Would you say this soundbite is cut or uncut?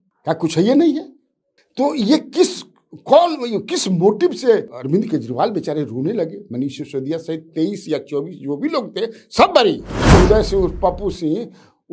cut